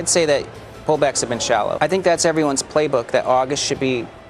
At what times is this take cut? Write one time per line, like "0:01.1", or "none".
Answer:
0:01.7